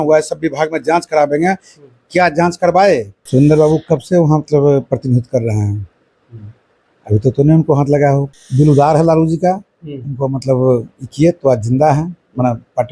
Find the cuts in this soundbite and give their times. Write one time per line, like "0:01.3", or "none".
0:03.2
0:08.3